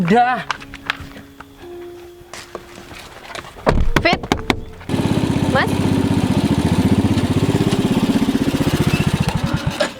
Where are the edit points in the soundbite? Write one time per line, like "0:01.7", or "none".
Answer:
0:04.9